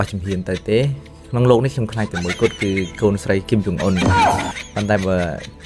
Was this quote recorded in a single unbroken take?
yes; 0 cuts

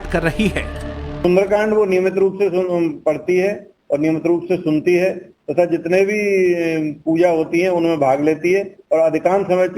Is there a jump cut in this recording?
yes; 1 cut; at 2.3 s

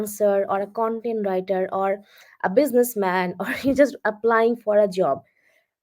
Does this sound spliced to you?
no; 0 cuts

